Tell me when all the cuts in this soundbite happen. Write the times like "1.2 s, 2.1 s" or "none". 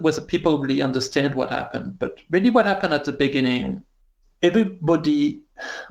4.2 s